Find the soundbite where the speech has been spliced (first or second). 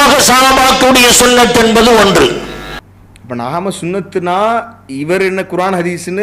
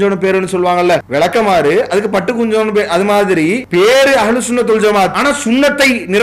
second